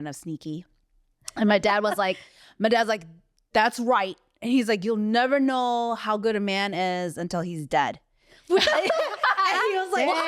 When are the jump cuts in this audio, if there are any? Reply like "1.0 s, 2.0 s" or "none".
none